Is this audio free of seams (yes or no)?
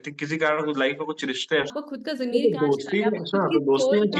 no